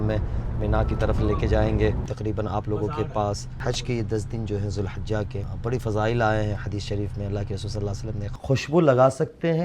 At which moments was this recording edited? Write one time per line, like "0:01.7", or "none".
0:02.1
0:03.5
0:05.5
0:08.2